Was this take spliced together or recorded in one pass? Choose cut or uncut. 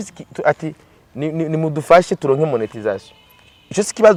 uncut